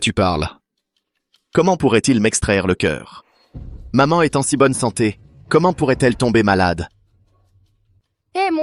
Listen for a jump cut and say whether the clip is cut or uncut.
uncut